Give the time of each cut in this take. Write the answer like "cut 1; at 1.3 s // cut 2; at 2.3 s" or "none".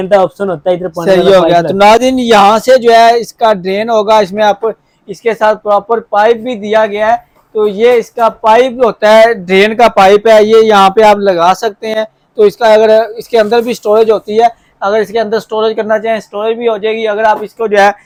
none